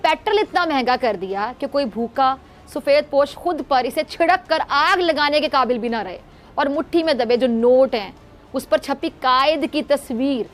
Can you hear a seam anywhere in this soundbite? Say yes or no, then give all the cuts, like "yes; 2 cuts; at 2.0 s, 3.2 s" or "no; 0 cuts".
no; 0 cuts